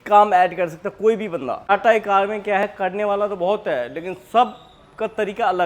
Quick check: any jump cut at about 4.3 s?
no; 1 cut; at 1.7 s

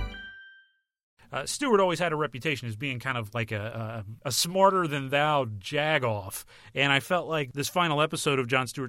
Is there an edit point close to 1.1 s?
yes; 3 cuts; at 1.1 s, 4.1 s, 7.5 s

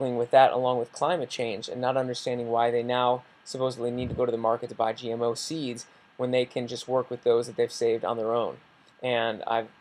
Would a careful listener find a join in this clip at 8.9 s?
no; 0 cuts

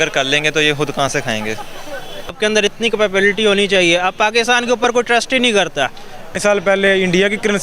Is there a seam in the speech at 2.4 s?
yes; 2 cuts; at 2.4 s, 6.4 s

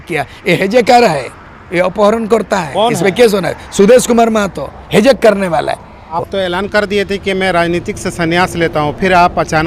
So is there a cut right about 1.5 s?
no; 1 cut; at 6.2 s

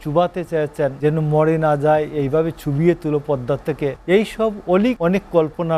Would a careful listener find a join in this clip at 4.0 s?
yes; 3 cuts; at 1.0 s, 4.0 s, 5.0 s

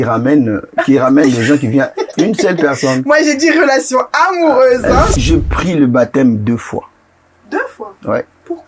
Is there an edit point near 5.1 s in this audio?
yes; 1 cut; at 5.1 s

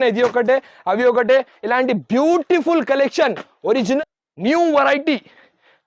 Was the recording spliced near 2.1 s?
no; 1 cut; at 4.0 s

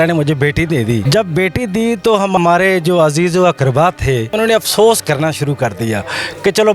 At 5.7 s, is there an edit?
no; 3 cuts; at 1.0 s, 2.4 s, 4.3 s

